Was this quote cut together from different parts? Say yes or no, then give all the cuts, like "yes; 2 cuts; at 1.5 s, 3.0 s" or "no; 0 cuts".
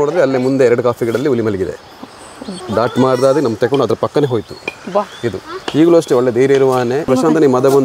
yes; 2 cuts; at 2.6 s, 7.1 s